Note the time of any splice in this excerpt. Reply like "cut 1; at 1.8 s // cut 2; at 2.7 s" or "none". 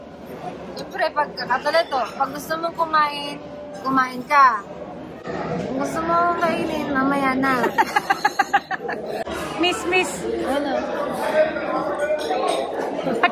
cut 1; at 5.2 s // cut 2; at 9.2 s